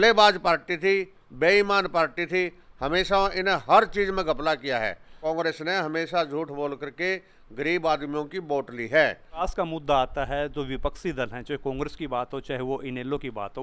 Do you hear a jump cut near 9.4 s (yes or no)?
yes